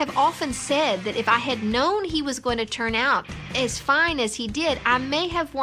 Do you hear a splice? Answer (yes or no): no